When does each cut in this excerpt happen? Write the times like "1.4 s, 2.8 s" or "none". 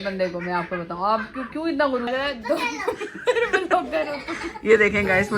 2.1 s

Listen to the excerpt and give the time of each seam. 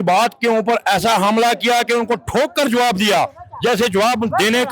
none

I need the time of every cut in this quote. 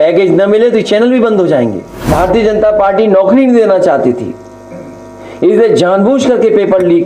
2.1 s

